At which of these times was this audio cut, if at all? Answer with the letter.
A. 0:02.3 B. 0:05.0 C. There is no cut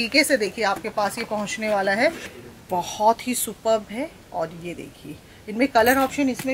A